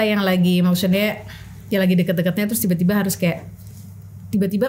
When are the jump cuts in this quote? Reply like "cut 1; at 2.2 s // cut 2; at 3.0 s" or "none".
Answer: none